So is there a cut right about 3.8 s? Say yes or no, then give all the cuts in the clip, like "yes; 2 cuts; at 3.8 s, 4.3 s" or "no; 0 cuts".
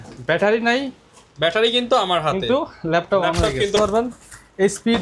yes; 1 cut; at 3.8 s